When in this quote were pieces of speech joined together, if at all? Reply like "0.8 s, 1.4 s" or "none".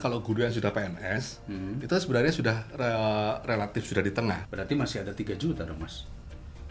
4.4 s